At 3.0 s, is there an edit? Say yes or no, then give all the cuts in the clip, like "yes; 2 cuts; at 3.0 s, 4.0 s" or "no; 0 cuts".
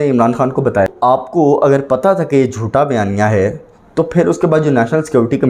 no; 1 cut; at 0.9 s